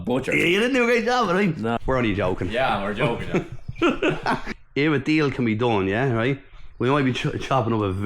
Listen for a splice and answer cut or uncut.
cut